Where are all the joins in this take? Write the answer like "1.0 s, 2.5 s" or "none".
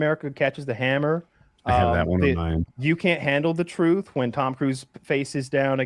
none